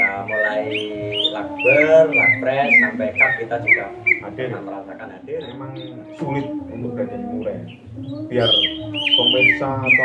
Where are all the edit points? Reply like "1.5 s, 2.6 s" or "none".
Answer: 5.7 s